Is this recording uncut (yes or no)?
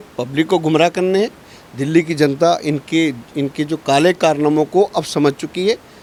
yes